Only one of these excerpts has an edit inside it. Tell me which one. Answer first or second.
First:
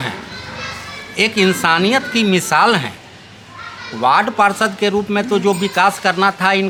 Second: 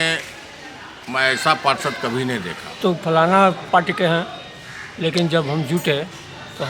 second